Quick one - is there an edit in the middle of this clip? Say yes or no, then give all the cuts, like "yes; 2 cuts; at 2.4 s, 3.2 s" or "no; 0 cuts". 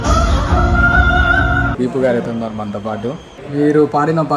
yes; 2 cuts; at 1.7 s, 3.3 s